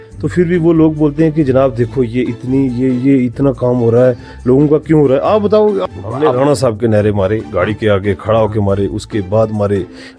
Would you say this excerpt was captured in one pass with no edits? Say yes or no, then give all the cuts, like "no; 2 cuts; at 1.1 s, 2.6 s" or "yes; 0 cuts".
no; 1 cut; at 5.8 s